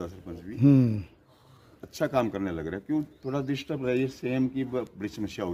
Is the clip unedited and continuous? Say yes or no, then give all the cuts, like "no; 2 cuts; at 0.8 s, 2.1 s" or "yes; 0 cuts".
yes; 0 cuts